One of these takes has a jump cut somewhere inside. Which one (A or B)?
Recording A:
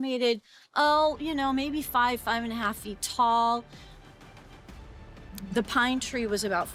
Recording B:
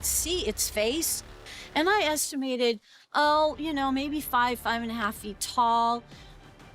B